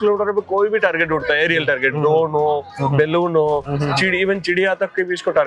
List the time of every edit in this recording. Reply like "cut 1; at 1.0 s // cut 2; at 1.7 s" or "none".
none